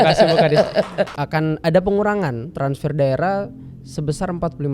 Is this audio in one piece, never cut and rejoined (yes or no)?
no